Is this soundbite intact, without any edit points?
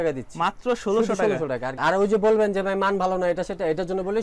no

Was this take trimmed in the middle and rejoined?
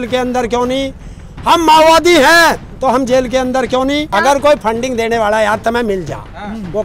yes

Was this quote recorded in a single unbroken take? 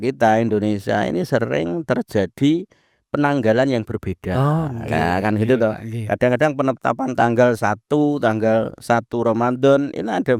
yes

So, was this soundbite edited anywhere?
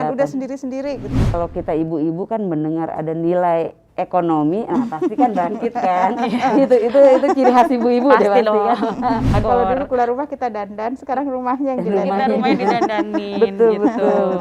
yes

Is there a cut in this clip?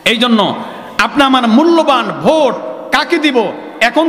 no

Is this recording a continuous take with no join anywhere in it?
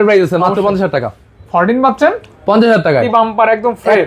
no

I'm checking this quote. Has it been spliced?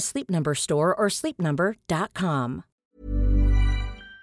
yes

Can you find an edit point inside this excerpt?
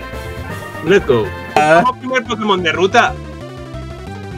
yes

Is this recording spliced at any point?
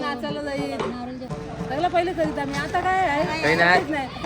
yes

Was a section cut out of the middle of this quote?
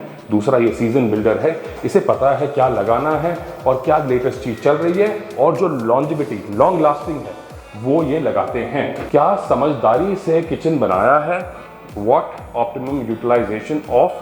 yes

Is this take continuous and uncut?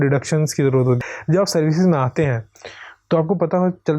no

